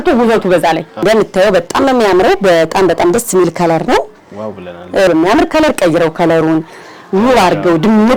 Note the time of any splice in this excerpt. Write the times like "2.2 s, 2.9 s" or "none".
1.0 s, 5.1 s